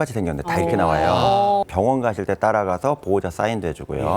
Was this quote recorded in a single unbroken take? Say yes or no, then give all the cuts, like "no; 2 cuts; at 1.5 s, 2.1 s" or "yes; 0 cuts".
no; 1 cut; at 1.6 s